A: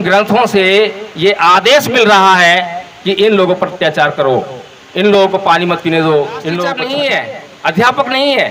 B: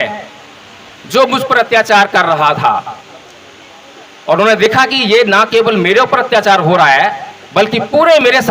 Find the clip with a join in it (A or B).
A